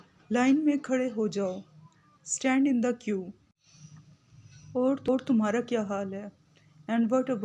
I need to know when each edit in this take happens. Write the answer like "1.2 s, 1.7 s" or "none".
5.1 s